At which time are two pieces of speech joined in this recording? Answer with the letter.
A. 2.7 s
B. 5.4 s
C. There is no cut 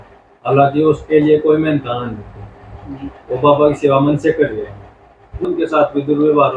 B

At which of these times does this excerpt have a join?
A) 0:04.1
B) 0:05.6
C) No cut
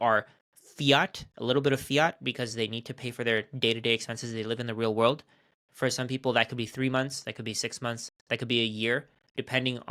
C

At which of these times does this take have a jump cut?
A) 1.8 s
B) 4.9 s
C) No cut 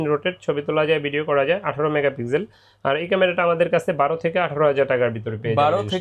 C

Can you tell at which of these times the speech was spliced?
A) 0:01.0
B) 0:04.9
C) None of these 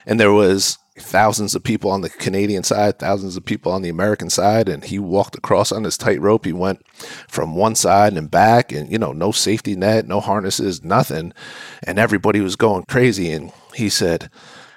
A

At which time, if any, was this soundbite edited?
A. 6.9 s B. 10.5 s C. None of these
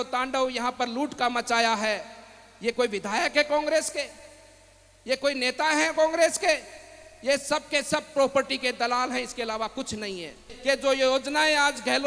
B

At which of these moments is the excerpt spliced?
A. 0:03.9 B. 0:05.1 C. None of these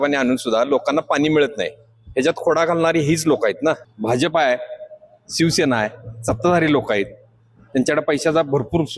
A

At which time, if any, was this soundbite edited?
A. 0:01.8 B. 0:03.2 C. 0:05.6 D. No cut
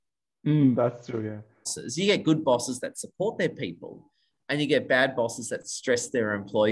A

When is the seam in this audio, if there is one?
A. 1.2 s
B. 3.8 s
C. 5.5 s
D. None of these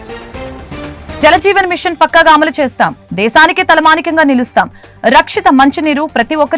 A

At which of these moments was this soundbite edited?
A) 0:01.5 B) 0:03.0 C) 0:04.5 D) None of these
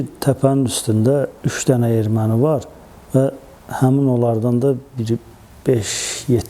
A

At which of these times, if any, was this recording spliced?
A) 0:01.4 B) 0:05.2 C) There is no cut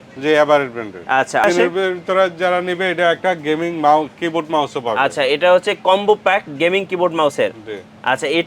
A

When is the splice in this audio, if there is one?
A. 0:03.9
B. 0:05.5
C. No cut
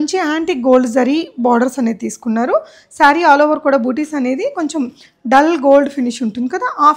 C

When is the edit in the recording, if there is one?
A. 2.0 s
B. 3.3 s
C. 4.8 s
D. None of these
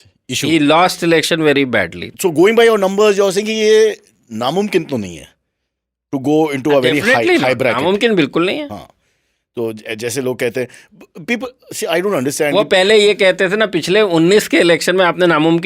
A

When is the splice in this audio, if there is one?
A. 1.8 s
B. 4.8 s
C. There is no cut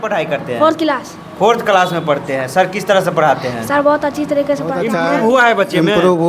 B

